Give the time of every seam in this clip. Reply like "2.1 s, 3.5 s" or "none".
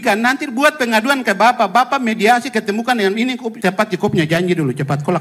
3.5 s